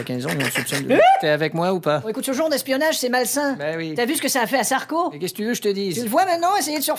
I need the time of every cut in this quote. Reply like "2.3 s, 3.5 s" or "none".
5.0 s